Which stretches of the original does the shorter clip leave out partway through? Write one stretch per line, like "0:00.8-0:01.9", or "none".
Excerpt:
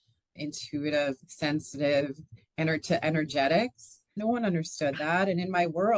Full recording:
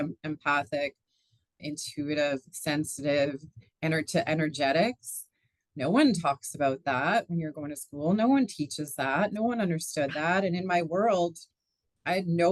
0:05.4-0:09.3

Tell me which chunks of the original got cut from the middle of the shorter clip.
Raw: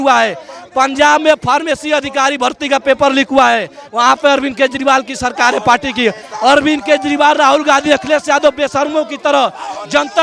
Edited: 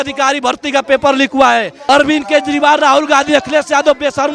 0:03.7-0:06.3

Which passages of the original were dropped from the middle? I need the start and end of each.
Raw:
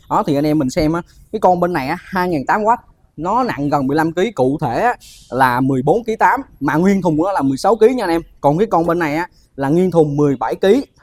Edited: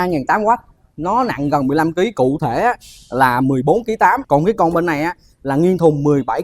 0:06.4-0:08.3

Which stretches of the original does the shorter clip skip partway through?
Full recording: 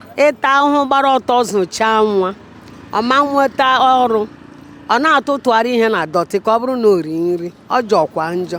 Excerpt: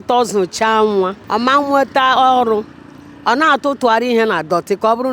0:02.4-0:02.8

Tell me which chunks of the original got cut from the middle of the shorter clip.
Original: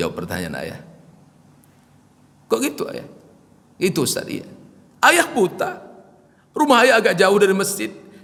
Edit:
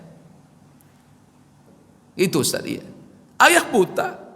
0:02.3-0:03.1

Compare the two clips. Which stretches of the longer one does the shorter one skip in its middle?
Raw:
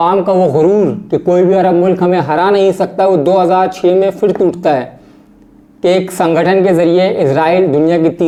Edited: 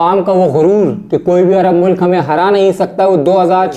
none

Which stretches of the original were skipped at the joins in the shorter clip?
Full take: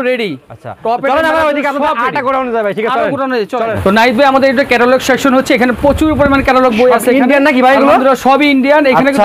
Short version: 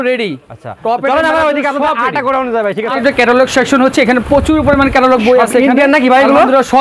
0:03.0-0:04.5

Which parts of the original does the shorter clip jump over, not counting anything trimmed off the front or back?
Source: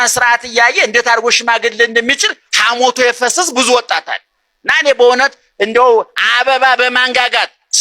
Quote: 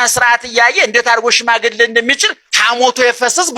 none

